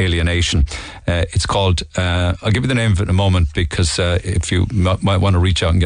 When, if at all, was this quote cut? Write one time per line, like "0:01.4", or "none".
0:04.4